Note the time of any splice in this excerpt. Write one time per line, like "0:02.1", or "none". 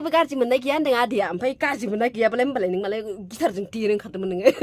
none